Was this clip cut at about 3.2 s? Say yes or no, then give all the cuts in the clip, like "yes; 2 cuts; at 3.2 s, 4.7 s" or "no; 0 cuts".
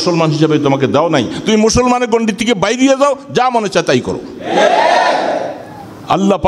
no; 1 cut; at 5.6 s